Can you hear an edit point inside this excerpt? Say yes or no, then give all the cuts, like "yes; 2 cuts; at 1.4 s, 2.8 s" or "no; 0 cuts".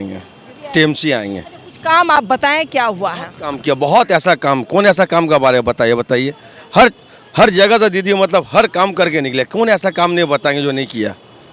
no; 0 cuts